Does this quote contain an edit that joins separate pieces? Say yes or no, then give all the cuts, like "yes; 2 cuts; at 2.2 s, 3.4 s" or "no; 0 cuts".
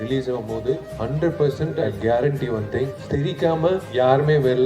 yes; 4 cuts; at 0.9 s, 1.8 s, 3.0 s, 3.9 s